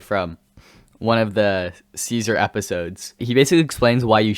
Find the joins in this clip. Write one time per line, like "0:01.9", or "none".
0:03.2